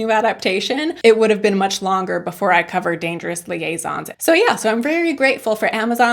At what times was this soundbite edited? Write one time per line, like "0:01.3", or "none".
0:04.1

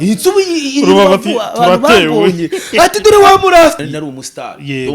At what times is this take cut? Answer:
0:03.8

